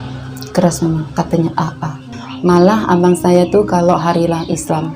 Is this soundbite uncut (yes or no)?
no